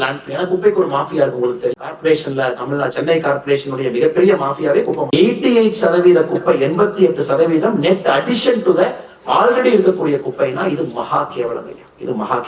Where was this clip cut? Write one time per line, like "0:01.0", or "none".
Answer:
0:05.1